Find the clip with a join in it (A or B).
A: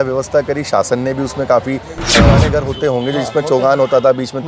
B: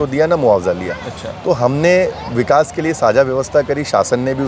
A